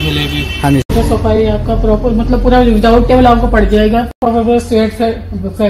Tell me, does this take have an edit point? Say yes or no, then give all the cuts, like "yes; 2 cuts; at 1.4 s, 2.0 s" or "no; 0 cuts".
yes; 2 cuts; at 1.4 s, 4.2 s